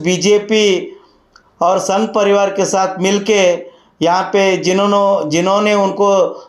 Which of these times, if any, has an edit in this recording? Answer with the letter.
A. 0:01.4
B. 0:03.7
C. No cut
C